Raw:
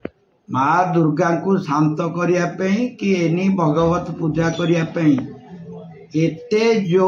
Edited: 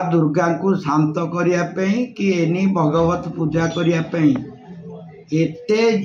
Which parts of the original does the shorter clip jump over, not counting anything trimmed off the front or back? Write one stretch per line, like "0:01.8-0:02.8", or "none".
none